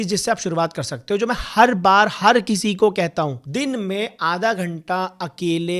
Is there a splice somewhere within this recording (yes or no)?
no